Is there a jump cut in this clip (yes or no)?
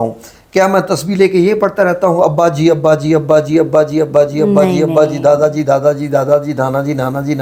no